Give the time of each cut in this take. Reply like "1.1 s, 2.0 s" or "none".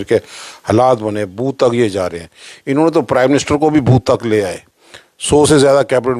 none